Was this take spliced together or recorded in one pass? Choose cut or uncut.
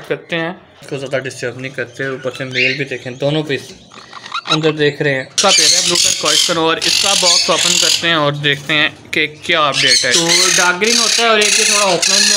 cut